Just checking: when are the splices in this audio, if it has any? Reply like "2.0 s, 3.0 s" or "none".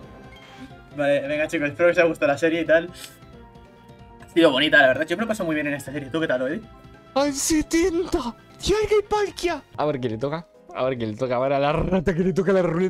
9.7 s